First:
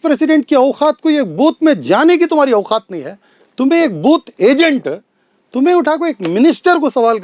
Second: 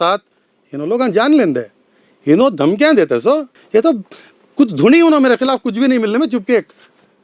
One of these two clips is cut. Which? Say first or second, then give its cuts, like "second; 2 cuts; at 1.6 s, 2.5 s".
second; 1 cut; at 3.6 s